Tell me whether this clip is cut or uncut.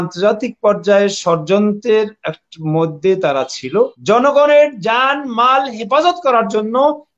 cut